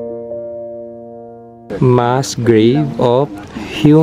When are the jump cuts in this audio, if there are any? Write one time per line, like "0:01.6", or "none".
0:01.7